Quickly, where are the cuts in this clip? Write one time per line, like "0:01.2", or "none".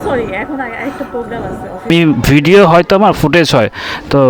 0:01.9

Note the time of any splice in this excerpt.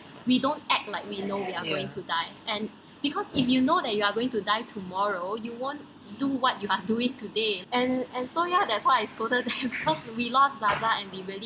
none

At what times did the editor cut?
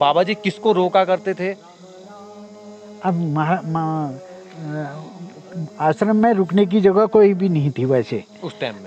none

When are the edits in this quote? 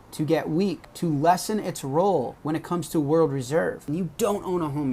0:00.9
0:02.4
0:03.8

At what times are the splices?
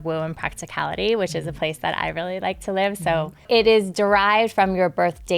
0:03.5

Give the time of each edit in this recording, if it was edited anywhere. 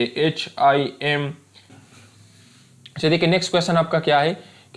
0:01.7

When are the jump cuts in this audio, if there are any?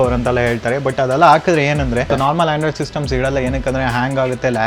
0:02.1

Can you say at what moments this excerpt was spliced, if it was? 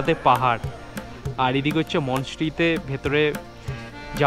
none

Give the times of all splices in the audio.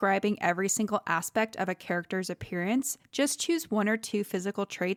none

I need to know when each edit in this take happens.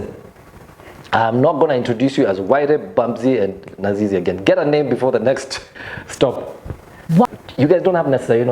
0:07.3

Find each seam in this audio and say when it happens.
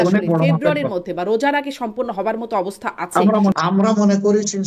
0:03.5

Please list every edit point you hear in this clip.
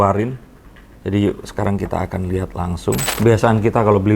0:03.1

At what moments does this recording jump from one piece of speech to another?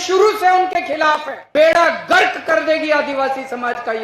0:01.4

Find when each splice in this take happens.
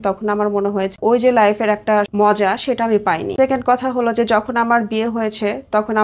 0:01.0
0:02.1
0:03.3

